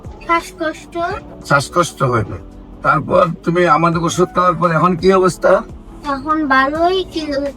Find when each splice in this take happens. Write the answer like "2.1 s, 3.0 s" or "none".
1.3 s